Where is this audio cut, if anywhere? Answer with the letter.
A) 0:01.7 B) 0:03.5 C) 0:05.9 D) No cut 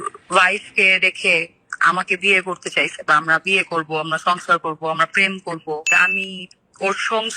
C